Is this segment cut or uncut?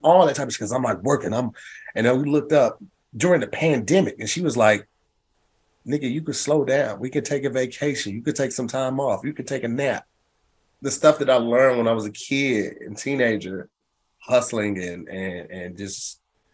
cut